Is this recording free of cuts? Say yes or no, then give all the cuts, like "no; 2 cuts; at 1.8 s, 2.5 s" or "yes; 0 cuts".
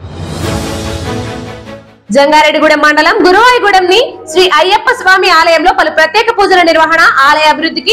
yes; 0 cuts